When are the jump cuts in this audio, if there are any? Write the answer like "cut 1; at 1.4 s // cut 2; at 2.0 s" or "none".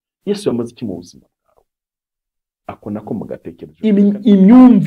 cut 1; at 3.7 s